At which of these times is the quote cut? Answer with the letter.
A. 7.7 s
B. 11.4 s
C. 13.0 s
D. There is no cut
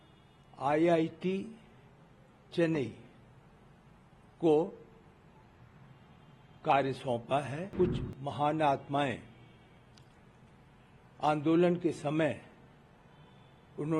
A